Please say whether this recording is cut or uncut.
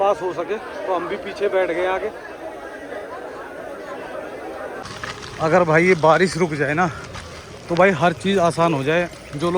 cut